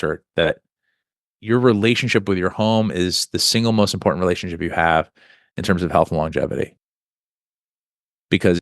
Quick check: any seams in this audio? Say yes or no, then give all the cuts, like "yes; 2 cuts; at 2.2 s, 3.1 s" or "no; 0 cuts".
yes; 1 cut; at 1.3 s